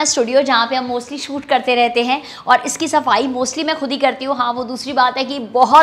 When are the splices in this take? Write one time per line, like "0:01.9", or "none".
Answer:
none